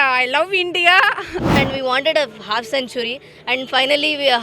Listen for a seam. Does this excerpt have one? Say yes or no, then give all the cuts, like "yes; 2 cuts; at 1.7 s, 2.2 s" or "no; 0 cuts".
yes; 1 cut; at 1.6 s